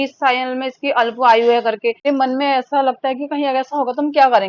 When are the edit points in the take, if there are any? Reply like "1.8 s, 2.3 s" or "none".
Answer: 2.1 s